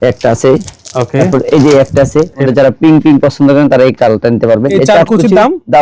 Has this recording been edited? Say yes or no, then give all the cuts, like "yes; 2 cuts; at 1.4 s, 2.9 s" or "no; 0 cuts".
yes; 2 cuts; at 2.5 s, 4.7 s